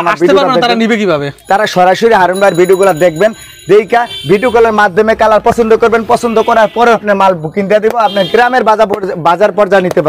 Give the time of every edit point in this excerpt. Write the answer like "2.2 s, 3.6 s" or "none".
1.3 s, 7.0 s